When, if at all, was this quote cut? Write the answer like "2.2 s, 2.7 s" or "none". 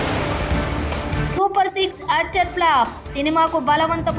1.1 s